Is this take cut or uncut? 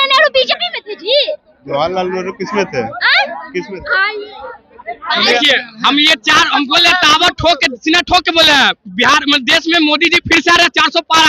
cut